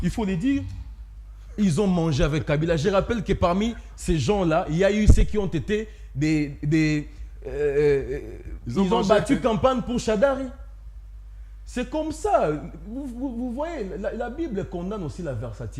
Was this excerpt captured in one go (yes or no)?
yes